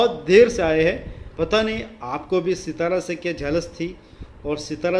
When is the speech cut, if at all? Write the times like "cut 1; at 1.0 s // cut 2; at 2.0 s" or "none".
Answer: cut 1; at 1.2 s